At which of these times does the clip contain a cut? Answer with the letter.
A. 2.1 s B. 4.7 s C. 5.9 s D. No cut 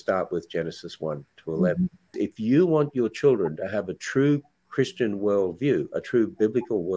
A